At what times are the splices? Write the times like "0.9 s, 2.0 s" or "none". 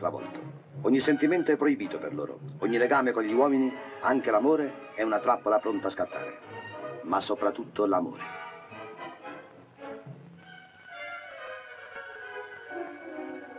1.9 s